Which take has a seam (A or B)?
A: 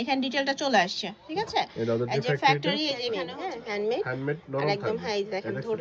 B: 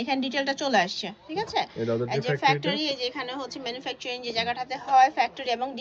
A